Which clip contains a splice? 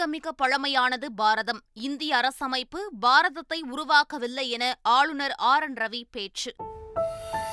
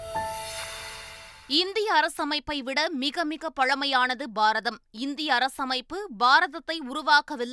second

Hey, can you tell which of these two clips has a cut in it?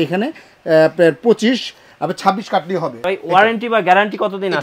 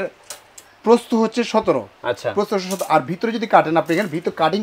first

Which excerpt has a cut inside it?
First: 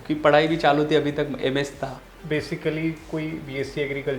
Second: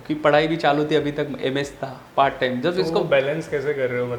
first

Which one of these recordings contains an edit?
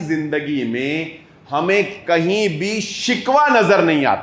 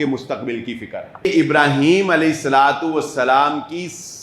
second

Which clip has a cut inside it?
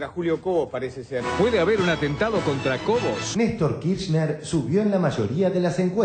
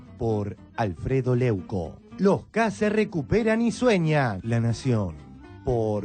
second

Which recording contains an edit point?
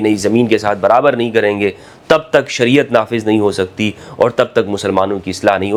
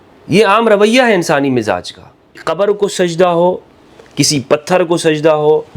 second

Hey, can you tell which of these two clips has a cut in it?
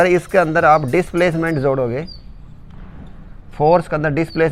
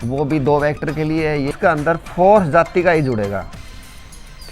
second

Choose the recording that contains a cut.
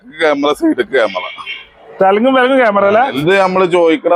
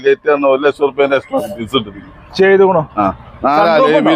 first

